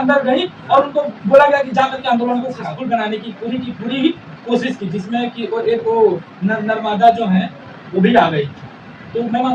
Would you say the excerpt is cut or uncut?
cut